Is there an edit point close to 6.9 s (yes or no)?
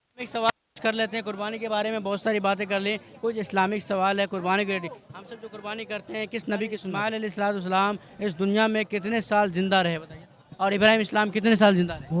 yes